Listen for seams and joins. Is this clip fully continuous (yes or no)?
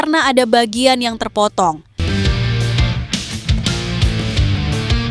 no